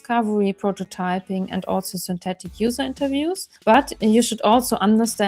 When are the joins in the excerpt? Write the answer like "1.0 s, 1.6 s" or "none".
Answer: 3.5 s

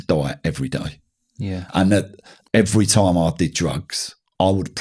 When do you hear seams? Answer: 2.3 s

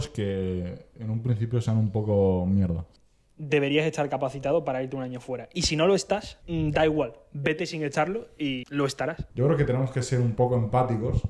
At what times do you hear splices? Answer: 2.9 s, 6.4 s, 8.8 s

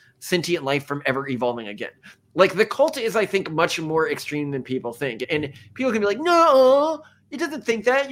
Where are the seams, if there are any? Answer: none

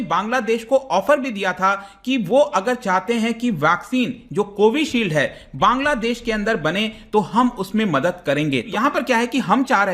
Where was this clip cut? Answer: 8.8 s

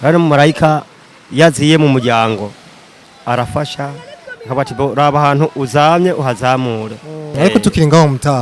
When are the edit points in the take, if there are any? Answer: 7.3 s

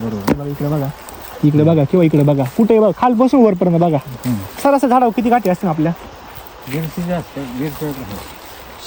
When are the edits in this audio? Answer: none

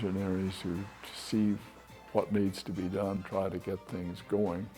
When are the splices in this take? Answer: 3.2 s

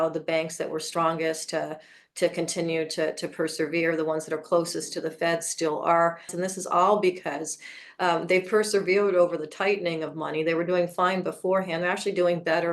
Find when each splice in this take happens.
6.3 s

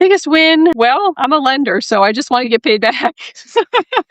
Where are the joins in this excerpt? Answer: 0.9 s

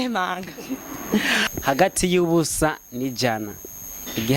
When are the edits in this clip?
1.5 s

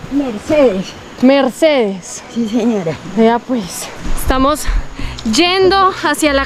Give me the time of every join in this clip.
none

